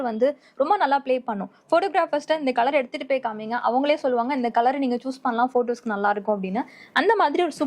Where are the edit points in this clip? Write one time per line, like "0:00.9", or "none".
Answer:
none